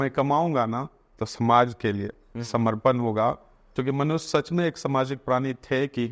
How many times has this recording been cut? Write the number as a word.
zero